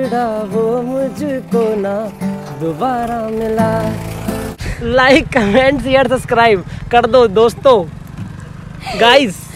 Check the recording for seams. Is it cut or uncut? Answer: cut